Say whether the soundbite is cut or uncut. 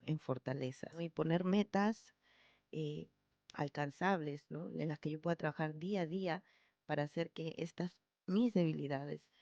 cut